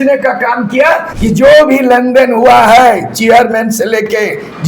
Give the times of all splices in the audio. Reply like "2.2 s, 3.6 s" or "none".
1.1 s